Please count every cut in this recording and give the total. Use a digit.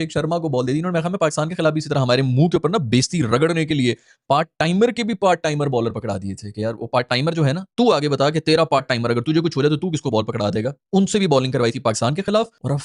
0